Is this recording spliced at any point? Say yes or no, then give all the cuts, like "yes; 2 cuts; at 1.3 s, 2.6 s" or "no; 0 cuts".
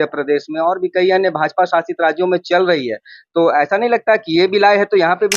no; 0 cuts